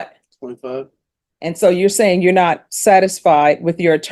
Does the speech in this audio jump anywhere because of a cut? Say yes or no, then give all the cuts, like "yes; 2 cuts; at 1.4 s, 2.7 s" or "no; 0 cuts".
no; 0 cuts